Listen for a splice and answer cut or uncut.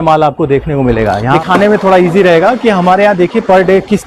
cut